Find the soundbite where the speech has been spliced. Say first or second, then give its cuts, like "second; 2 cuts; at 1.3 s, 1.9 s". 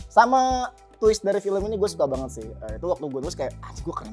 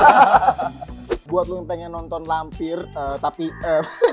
second; 1 cut; at 1.2 s